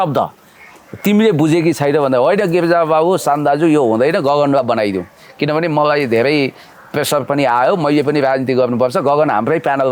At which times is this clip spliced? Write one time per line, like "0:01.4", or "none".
none

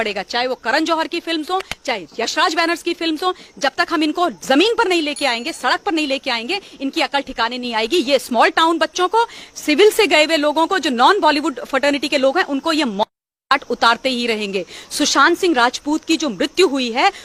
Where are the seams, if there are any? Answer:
none

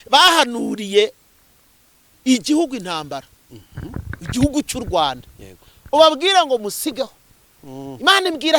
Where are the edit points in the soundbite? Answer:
none

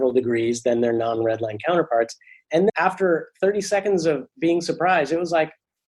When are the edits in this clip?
0:02.7

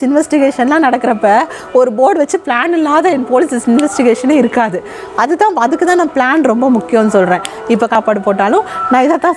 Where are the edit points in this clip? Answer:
0:07.9

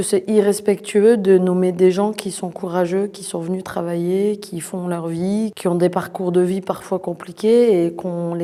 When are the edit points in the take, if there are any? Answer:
none

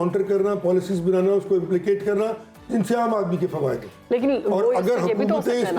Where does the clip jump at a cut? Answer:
none

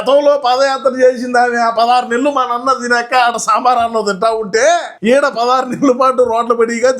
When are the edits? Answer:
0:04.9

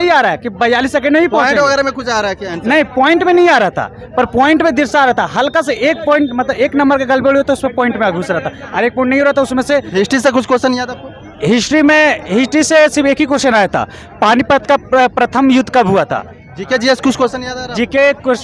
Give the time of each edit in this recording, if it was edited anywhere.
none

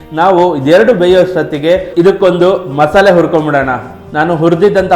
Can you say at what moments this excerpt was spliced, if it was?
0:04.0

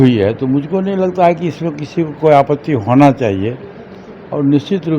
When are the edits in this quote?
none

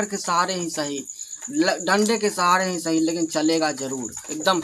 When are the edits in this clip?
none

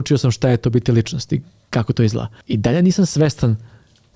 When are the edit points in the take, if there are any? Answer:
0:02.3

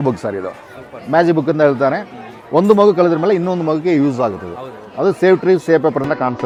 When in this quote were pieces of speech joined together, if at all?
none

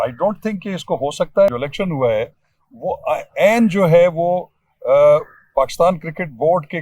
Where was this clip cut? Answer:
0:01.5

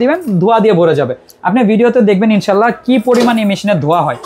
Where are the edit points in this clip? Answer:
none

